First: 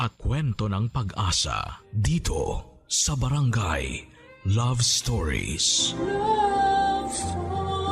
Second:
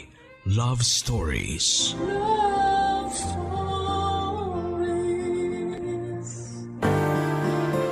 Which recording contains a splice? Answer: second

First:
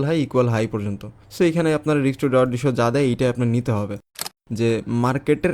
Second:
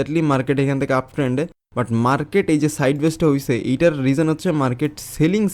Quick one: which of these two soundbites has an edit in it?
first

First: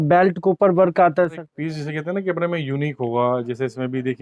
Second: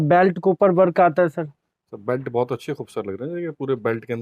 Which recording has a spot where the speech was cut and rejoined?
first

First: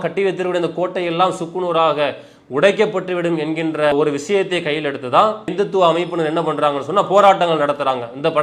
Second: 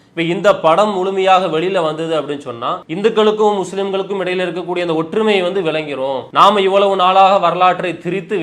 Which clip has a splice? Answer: second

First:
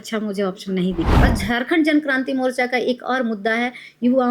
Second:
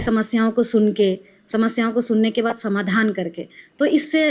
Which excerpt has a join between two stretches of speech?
first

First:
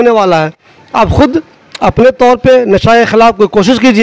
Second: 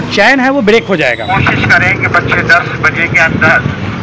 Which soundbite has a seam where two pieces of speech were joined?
second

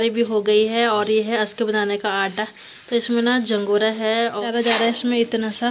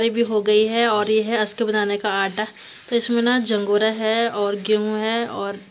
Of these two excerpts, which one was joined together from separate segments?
first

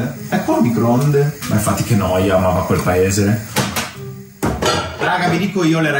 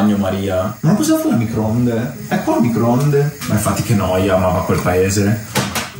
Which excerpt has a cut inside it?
first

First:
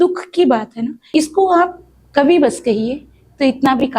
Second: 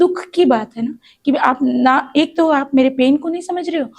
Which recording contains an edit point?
first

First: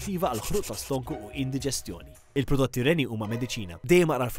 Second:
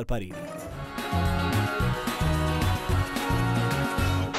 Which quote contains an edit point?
second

